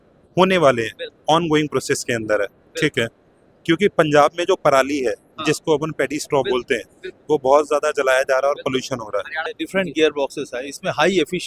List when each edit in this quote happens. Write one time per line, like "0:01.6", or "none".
0:09.5